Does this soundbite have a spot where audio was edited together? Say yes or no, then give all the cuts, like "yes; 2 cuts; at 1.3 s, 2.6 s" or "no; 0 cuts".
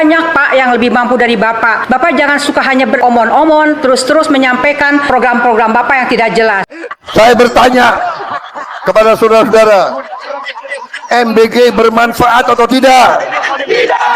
yes; 1 cut; at 6.7 s